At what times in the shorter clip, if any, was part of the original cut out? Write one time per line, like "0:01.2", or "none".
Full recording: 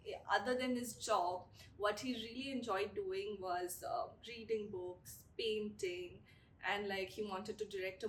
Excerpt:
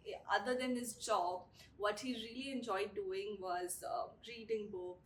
none